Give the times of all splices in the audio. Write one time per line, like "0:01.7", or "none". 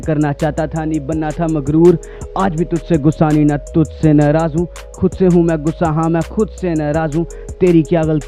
none